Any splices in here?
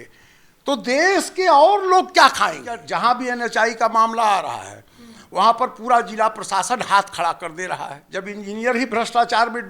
yes; 2 cuts; at 2.8 s, 8.0 s

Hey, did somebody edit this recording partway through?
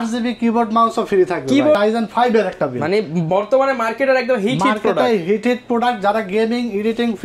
yes; 1 cut; at 1.8 s

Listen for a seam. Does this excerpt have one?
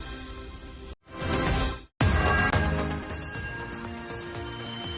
yes; 2 cuts; at 1.0 s, 4.1 s

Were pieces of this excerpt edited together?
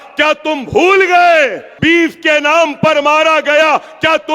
yes; 1 cut; at 1.7 s

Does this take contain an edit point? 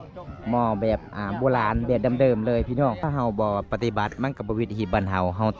yes; 1 cut; at 3.0 s

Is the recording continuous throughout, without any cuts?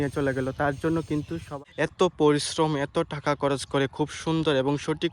no; 1 cut; at 1.5 s

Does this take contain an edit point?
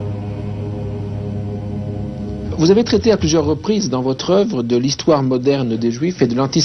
no; 0 cuts

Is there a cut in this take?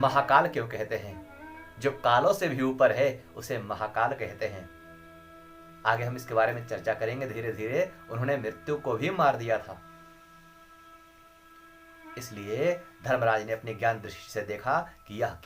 no; 0 cuts

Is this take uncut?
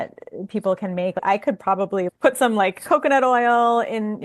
no; 1 cut; at 1.2 s

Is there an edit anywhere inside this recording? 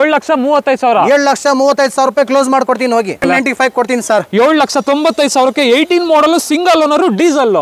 yes; 1 cut; at 3.2 s

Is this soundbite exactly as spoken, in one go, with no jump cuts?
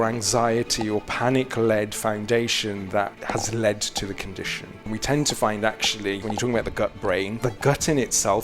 no; 4 cuts; at 3.2 s, 4.9 s, 6.2 s, 7.4 s

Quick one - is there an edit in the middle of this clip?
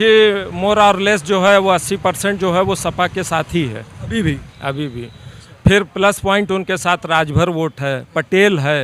no; 0 cuts

